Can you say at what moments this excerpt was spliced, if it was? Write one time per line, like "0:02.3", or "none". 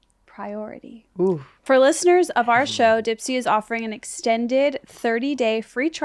0:01.5